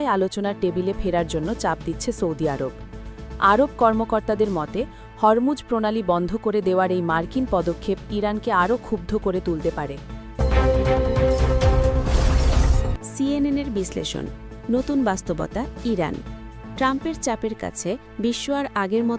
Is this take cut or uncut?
cut